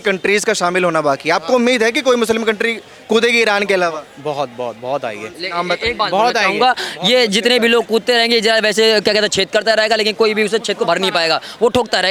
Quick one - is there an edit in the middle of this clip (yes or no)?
no